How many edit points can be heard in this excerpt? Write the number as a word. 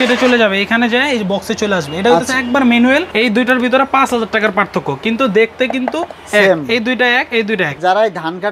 two